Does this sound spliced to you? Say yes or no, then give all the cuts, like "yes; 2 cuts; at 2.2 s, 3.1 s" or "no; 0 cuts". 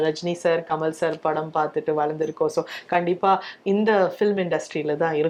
no; 0 cuts